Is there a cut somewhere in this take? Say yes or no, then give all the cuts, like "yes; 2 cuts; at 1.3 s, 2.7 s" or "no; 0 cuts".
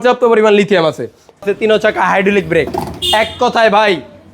yes; 1 cut; at 1.5 s